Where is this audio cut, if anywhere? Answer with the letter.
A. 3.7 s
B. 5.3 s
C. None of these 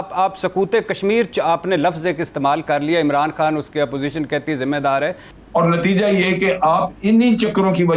B